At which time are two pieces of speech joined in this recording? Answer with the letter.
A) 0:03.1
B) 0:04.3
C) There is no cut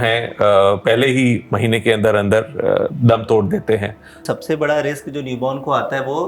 B